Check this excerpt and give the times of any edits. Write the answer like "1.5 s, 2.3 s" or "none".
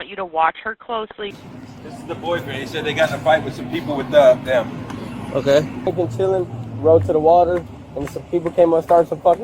1.4 s, 5.9 s